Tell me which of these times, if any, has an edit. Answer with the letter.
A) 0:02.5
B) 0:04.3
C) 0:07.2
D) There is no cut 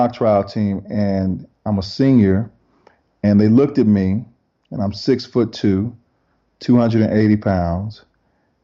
D